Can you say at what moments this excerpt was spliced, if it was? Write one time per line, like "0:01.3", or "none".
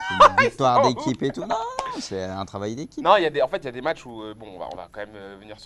0:02.4